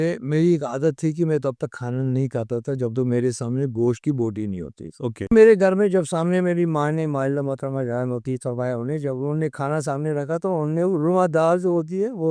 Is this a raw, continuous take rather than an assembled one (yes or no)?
no